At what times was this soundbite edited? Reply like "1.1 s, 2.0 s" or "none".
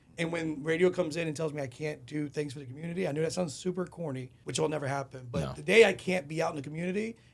4.3 s